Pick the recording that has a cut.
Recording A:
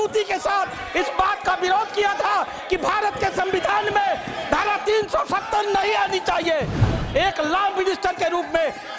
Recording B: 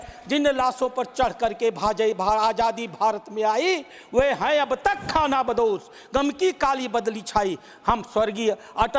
A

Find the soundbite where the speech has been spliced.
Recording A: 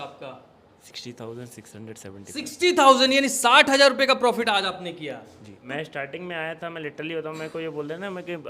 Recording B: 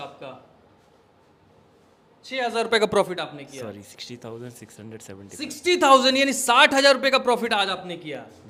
A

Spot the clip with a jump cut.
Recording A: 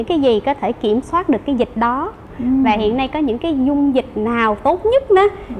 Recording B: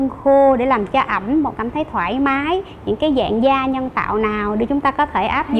A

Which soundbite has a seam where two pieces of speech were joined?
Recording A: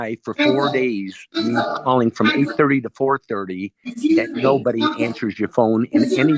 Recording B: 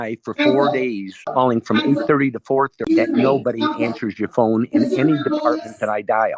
B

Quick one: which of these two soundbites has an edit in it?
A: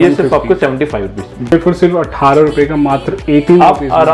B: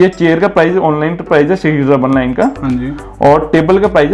A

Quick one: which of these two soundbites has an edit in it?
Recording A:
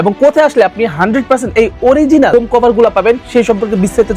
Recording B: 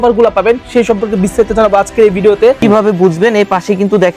B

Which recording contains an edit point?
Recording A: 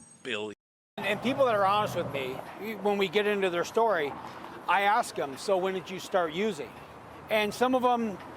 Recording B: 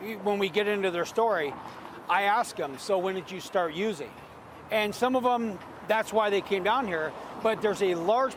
A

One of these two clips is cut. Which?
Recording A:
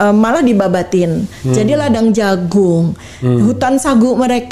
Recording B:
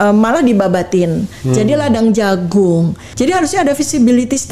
B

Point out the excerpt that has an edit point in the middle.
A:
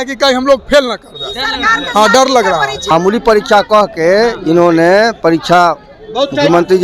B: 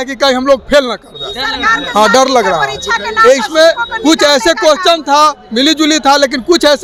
A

